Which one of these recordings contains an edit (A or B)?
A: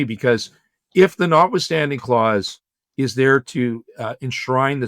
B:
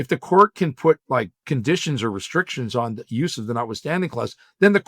B